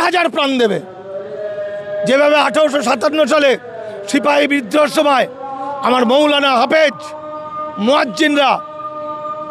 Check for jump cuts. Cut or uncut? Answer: uncut